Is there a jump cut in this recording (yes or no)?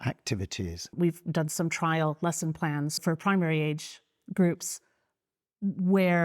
yes